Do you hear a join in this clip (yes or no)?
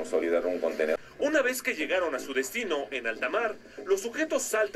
yes